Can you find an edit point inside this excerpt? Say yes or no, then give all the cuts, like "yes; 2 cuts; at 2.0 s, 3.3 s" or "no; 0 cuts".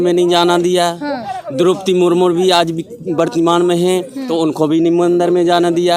no; 0 cuts